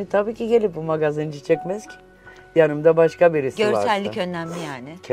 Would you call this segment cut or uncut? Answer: uncut